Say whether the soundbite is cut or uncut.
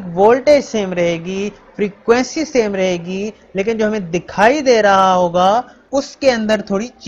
cut